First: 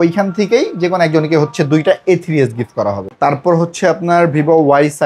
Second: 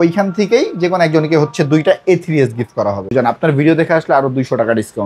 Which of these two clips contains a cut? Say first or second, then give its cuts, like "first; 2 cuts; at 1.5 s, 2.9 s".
second; 1 cut; at 3.1 s